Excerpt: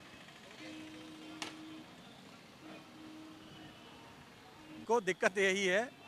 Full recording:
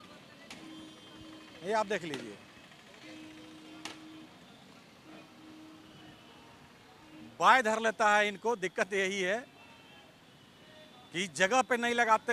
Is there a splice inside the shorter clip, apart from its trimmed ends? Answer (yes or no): yes